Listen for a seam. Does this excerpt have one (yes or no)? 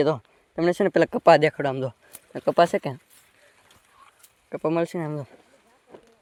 no